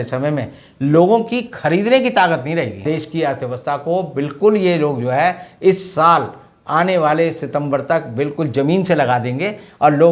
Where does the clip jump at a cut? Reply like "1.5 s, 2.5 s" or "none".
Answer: 2.8 s